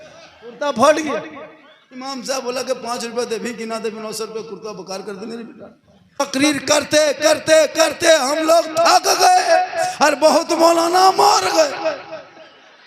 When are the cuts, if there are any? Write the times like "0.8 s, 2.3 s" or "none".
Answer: 6.2 s